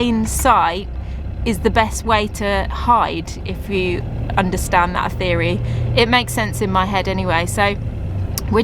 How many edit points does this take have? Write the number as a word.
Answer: zero